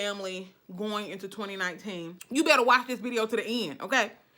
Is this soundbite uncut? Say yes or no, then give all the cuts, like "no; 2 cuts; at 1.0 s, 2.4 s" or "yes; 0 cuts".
no; 1 cut; at 2.1 s